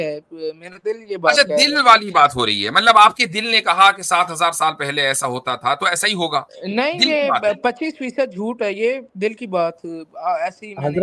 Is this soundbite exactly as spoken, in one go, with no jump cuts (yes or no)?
yes